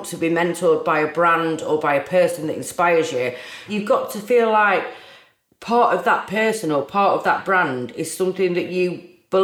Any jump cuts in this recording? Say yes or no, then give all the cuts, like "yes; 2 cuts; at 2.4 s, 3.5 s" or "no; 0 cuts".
yes; 1 cut; at 3.6 s